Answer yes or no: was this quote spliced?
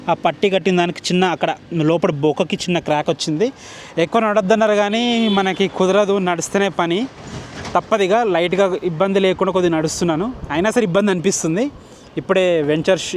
no